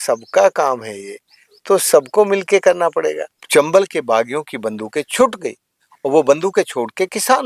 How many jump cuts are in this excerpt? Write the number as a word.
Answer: one